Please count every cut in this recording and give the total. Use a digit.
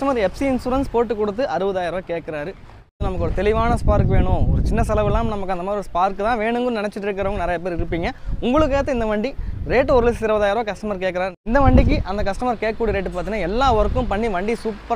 2